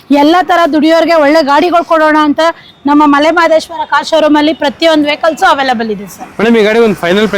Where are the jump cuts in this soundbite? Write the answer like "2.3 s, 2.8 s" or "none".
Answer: none